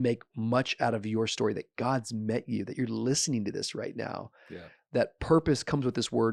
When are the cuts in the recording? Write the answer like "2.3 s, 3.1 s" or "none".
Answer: none